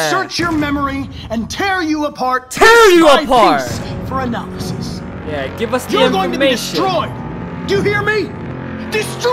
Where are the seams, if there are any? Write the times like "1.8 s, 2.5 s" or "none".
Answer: none